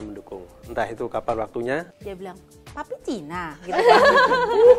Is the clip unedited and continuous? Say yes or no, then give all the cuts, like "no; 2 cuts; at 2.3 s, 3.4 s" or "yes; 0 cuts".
no; 1 cut; at 2.0 s